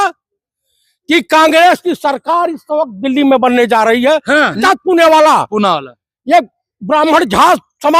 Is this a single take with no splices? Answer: no; 1 cut; at 4.6 s

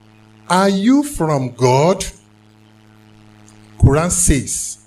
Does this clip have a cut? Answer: yes; 1 cut; at 2.2 s

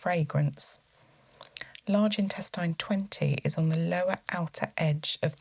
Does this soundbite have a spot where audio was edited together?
no; 0 cuts

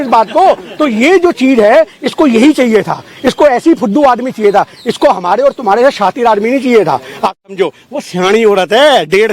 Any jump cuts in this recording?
yes; 1 cut; at 7.4 s

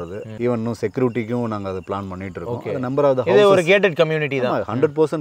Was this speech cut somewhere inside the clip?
no; 0 cuts

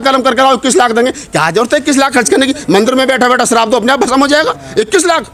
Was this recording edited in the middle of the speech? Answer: no; 0 cuts

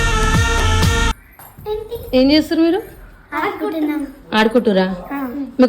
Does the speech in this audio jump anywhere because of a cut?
yes; 1 cut; at 1.2 s

